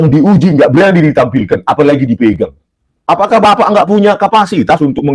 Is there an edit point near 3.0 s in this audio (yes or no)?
yes